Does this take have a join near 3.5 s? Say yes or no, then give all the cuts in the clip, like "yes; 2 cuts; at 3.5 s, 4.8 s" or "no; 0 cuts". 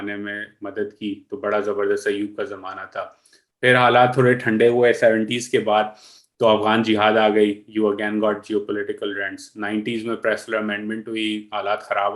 no; 0 cuts